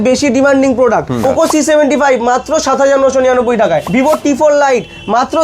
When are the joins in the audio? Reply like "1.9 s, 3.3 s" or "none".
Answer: 1.2 s, 3.9 s